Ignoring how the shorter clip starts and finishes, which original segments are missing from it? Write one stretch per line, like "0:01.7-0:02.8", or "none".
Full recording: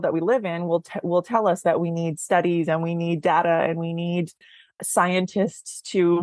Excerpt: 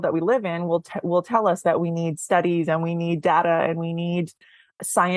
none

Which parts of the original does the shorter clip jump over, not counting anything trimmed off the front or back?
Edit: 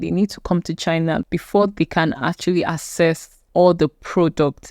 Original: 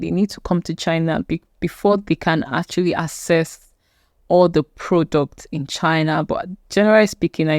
0:01.2-0:01.5
0:03.6-0:04.1

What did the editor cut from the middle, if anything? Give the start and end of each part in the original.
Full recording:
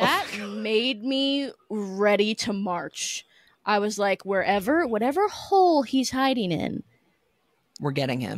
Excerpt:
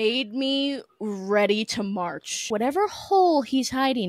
0:03.2-0:04.9

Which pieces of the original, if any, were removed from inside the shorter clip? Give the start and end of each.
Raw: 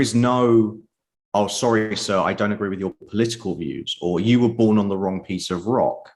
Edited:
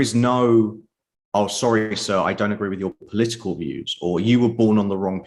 none

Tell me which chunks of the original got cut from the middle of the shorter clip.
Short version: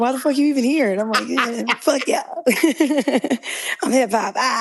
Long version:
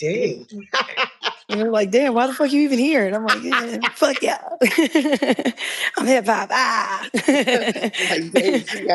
none

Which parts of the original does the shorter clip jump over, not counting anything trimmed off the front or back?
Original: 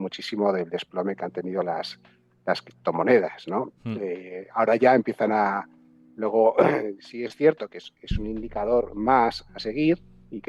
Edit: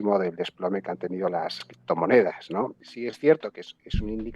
0:02.1-0:02.7
0:03.8-0:07.0

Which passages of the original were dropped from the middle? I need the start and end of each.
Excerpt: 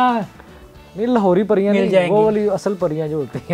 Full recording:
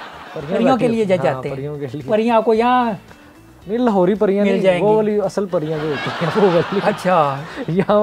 none

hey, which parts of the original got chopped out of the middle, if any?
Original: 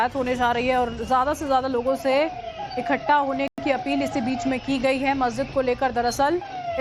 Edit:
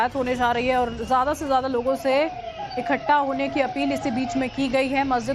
0:03.5-0:03.6

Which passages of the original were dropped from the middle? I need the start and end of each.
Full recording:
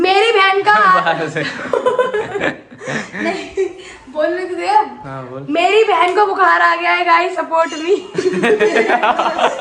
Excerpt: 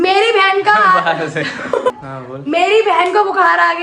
0:01.9-0:05.0

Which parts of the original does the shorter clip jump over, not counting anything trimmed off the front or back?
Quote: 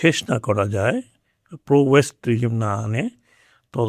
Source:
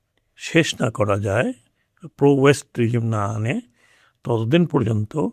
none

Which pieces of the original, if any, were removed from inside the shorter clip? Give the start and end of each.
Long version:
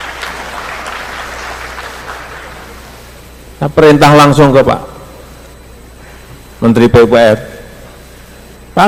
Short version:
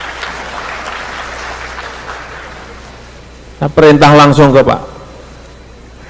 none

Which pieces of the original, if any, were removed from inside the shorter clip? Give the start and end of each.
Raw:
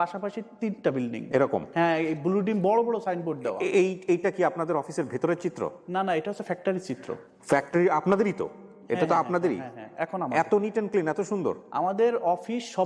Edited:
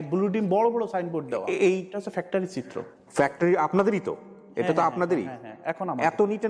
0:04.0-0:06.2

